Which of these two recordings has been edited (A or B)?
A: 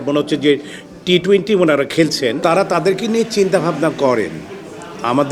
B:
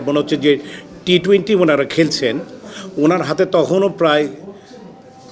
A